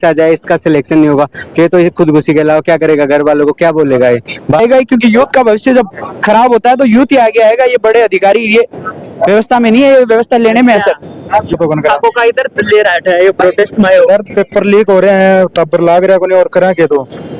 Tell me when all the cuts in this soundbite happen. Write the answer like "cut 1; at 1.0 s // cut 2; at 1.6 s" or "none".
cut 1; at 4.6 s // cut 2; at 11.5 s